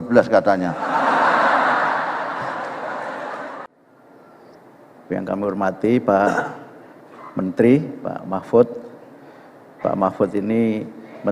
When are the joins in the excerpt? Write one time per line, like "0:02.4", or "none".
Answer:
0:03.6

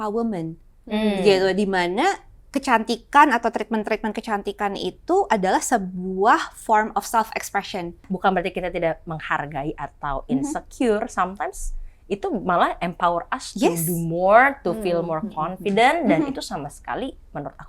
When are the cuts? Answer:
0:08.1

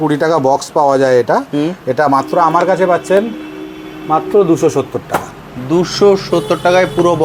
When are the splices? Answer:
none

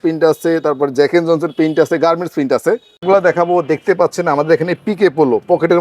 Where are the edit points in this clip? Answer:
0:03.0

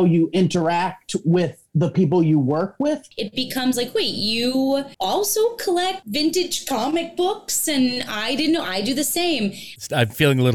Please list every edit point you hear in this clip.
0:03.1
0:04.9
0:06.0
0:09.7

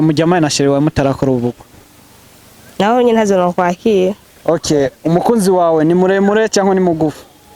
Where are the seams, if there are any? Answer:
0:04.3

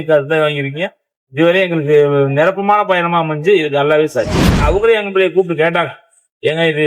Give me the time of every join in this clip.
0:04.6

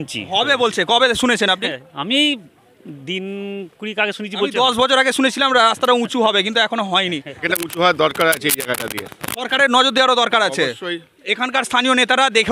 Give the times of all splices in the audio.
0:07.3

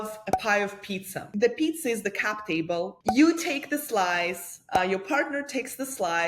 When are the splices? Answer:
0:01.3
0:02.9

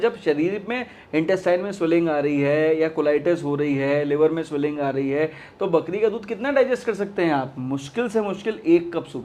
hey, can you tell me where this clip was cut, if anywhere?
none

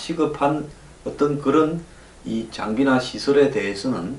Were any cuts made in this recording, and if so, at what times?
0:03.1

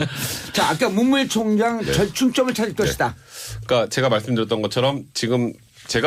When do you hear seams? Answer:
none

